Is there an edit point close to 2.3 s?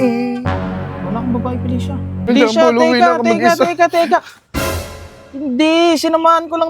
yes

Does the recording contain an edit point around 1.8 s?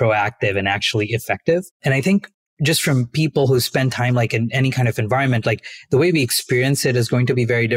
yes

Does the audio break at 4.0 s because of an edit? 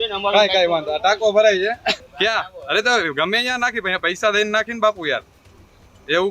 no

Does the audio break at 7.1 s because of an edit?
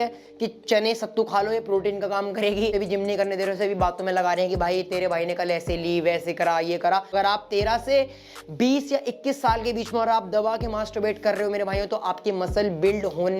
yes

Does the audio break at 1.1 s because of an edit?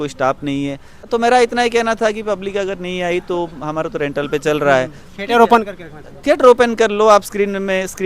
yes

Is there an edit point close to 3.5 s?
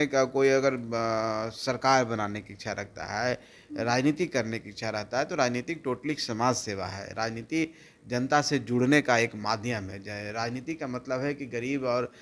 no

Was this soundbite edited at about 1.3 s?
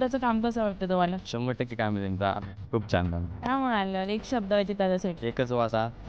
yes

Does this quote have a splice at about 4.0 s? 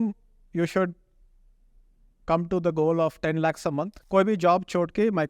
yes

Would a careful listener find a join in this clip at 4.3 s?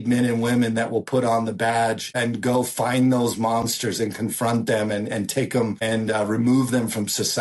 no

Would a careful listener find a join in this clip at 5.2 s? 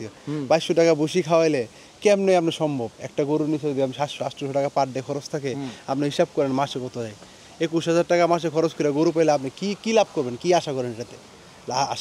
no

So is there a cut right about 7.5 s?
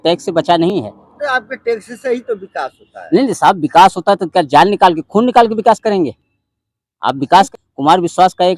yes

